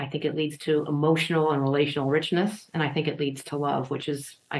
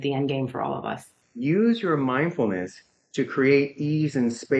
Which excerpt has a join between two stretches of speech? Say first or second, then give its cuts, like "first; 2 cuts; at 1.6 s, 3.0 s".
second; 1 cut; at 1.2 s